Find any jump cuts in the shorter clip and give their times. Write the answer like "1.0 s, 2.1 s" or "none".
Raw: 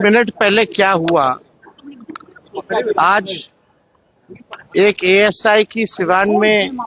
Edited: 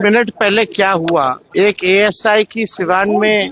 1.4 s